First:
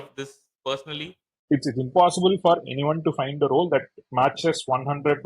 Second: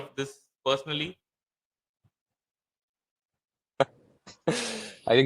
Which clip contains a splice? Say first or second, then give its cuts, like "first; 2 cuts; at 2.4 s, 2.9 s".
first; 1 cut; at 1.4 s